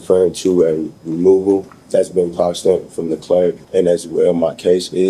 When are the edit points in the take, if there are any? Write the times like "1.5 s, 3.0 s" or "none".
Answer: 1.8 s, 3.6 s